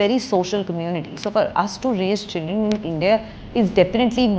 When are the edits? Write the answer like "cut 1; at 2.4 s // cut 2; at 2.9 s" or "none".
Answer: none